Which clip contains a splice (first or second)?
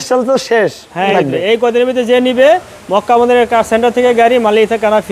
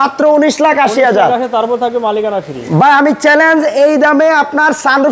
first